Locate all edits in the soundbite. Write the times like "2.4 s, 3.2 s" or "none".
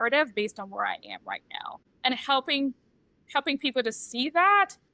1.8 s